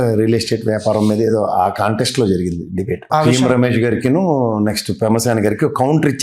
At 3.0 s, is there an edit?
yes; 1 cut; at 3.0 s

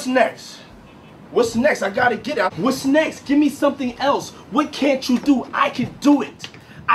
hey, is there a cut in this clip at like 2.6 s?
yes; 1 cut; at 2.6 s

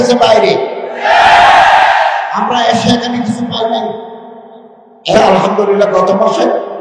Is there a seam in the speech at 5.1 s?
yes; 1 cut; at 5.1 s

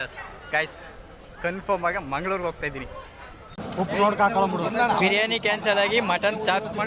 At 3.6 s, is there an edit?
yes; 1 cut; at 3.6 s

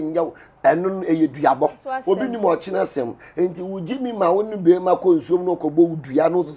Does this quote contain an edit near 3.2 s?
no; 1 cut; at 1.9 s

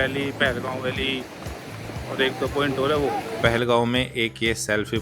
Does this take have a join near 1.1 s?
no; 1 cut; at 3.4 s

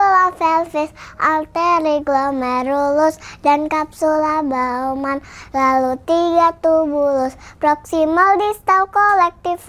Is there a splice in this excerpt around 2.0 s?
no; 0 cuts

